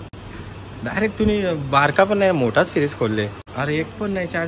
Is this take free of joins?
no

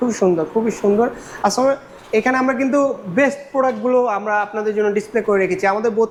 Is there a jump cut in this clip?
no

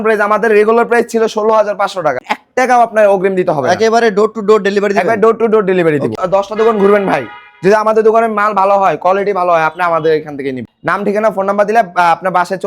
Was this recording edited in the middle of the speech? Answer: yes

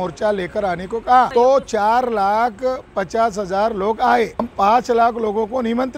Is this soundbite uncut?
no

